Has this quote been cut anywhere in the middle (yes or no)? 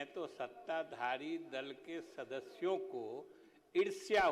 no